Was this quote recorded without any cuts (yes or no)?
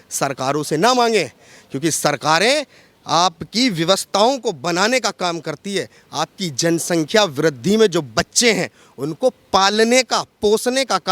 yes